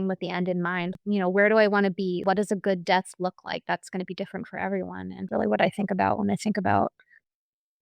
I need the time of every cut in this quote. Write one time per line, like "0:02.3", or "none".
0:00.9
0:02.2
0:05.2